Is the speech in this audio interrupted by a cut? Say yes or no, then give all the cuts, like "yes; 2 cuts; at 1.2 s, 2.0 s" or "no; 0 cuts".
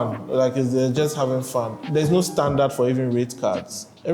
yes; 1 cut; at 1.8 s